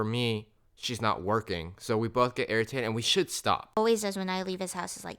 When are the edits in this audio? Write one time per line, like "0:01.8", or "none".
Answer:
0:03.8